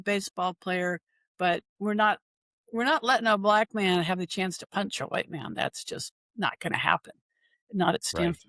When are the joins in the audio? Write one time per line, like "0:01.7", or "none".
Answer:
none